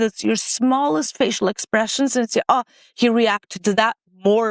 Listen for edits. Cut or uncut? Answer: uncut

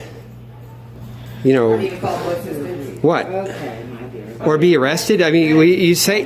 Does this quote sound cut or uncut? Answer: uncut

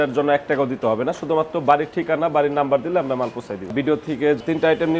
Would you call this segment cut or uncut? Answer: cut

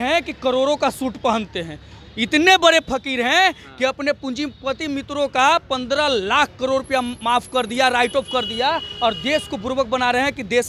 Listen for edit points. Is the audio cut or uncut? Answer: uncut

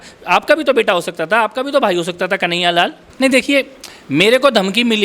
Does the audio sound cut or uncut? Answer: cut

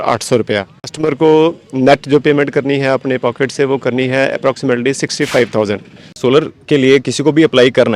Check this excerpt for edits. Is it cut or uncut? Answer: cut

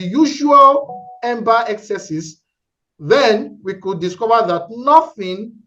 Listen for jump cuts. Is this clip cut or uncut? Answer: uncut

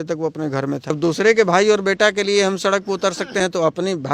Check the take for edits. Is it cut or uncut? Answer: cut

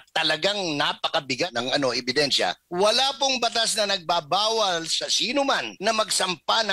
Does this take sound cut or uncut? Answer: cut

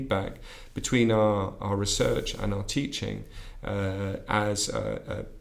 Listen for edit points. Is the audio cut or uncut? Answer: uncut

